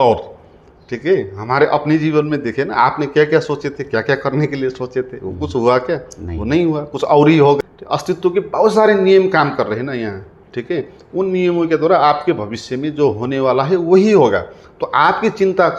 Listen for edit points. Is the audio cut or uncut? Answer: cut